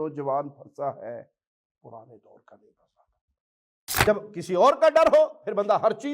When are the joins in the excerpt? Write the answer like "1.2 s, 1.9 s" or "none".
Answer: 4.1 s